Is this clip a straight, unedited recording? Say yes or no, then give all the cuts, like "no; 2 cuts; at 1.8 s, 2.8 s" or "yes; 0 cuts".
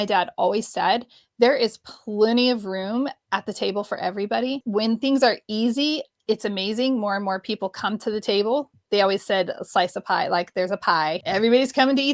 no; 2 cuts; at 4.6 s, 11.2 s